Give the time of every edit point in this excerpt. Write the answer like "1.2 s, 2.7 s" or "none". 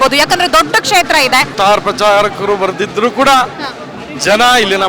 1.5 s